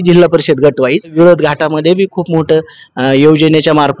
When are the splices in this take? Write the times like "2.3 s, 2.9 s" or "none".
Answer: 1.1 s